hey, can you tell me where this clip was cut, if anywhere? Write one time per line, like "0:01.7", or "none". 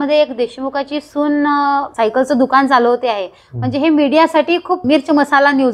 0:01.9
0:04.8